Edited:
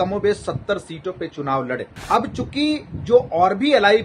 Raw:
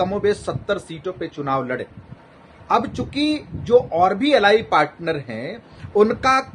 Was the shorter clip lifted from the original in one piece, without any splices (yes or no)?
no